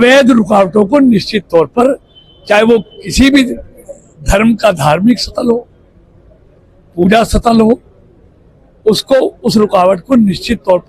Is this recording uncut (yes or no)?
yes